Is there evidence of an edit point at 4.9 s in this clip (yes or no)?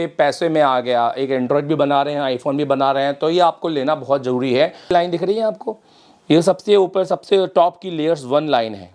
yes